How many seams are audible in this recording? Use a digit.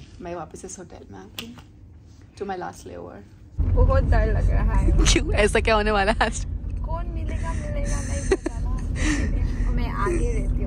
1